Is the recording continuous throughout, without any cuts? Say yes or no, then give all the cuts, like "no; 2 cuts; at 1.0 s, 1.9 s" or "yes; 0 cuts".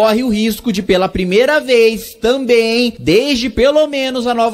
no; 1 cut; at 3.0 s